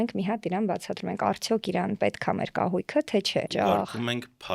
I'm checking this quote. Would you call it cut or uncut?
cut